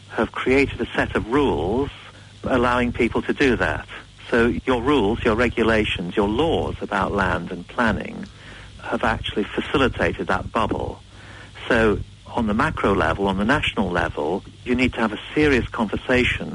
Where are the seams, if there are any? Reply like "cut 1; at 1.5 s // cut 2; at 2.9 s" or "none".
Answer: cut 1; at 2.4 s // cut 2; at 4.6 s // cut 3; at 14.7 s